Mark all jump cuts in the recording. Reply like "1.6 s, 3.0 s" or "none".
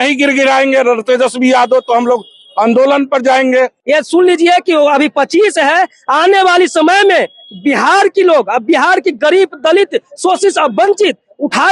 3.8 s